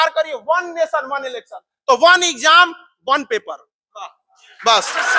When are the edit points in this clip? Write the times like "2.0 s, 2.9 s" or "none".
none